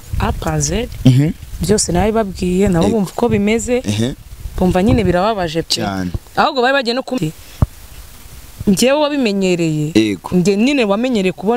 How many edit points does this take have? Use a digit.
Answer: 1